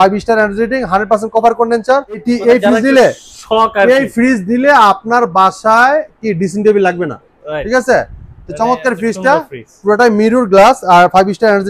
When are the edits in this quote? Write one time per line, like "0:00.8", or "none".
0:02.2